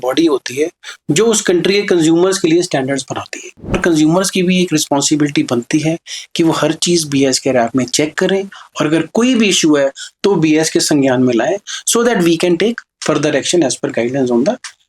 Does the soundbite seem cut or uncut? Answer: cut